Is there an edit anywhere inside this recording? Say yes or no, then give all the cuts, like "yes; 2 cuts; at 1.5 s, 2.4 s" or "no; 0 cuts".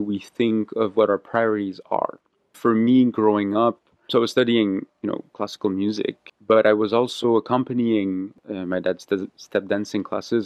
yes; 4 cuts; at 2.6 s, 4.0 s, 6.3 s, 8.3 s